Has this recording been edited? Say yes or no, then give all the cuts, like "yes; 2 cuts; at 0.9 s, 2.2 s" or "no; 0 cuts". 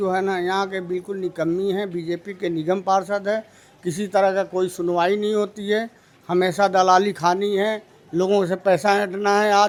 no; 0 cuts